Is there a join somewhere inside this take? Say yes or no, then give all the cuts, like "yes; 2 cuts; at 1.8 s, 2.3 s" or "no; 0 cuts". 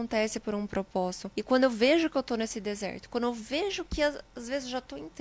yes; 1 cut; at 1.3 s